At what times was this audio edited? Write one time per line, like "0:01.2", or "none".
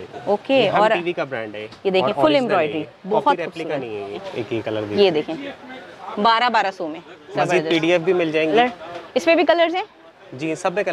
0:04.1
0:08.5